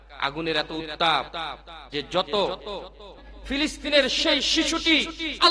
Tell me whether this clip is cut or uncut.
cut